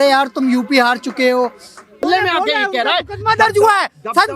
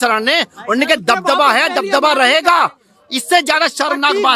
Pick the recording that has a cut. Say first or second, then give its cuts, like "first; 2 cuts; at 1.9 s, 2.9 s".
first; 1 cut; at 2.0 s